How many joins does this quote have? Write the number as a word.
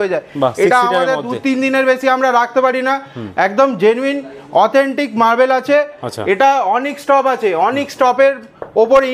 zero